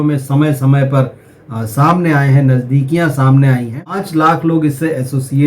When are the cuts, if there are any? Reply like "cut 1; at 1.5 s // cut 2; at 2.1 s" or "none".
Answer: cut 1; at 3.9 s